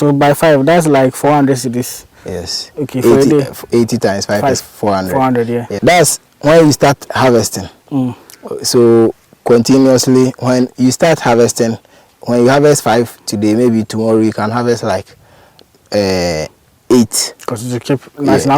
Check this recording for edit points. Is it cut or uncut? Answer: cut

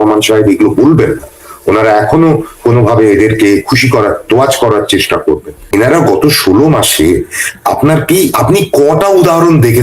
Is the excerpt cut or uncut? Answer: cut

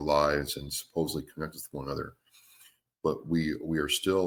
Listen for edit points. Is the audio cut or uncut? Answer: uncut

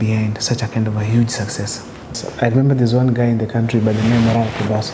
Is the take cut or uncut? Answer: cut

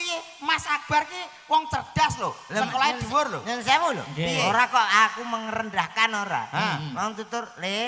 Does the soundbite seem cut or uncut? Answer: uncut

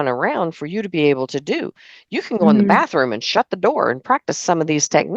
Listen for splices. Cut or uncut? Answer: uncut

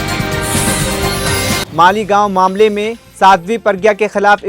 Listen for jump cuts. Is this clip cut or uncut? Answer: cut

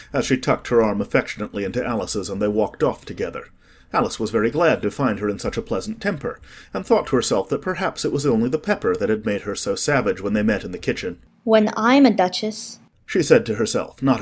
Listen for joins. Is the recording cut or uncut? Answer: cut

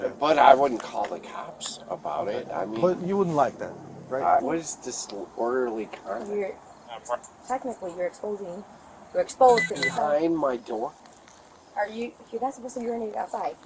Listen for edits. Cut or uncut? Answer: cut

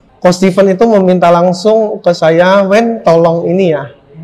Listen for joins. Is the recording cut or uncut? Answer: uncut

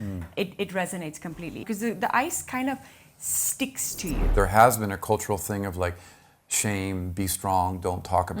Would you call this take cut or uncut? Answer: cut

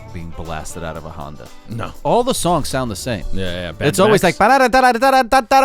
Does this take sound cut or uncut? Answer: cut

